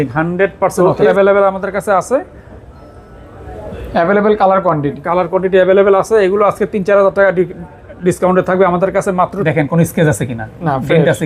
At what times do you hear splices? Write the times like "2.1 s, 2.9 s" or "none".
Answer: 1.1 s, 9.4 s